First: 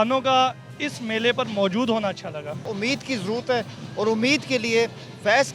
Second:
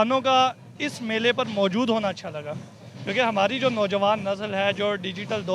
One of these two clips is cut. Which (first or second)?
first